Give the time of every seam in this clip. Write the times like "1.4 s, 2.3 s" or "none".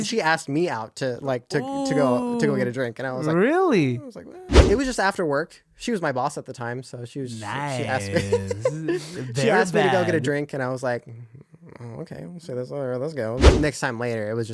4.5 s, 13.5 s